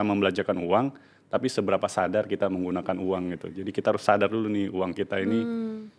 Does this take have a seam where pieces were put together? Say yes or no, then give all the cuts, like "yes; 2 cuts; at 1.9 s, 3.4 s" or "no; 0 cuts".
no; 0 cuts